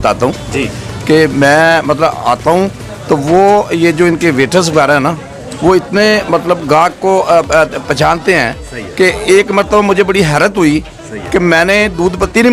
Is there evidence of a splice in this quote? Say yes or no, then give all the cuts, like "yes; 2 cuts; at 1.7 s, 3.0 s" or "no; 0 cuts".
no; 0 cuts